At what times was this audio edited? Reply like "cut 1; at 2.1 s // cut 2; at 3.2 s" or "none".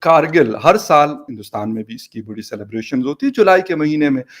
cut 1; at 1.3 s